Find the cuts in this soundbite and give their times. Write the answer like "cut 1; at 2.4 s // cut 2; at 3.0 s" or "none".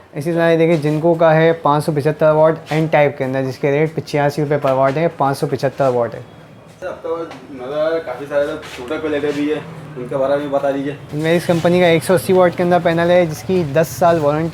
none